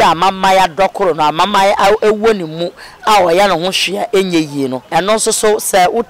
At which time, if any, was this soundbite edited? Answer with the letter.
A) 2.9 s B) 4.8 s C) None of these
B